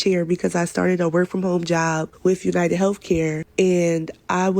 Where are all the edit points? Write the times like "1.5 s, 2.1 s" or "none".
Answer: 3.0 s